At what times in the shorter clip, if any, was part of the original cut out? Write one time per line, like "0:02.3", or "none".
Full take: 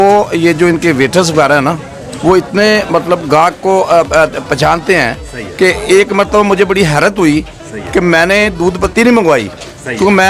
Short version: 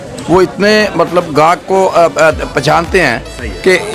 none